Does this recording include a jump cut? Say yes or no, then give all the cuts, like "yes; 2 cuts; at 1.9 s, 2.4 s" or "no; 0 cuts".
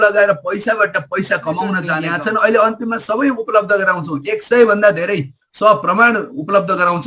yes; 1 cut; at 1.9 s